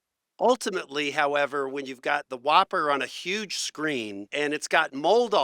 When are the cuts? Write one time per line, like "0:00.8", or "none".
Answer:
0:04.2